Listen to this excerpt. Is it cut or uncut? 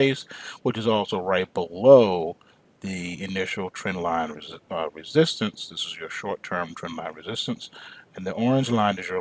uncut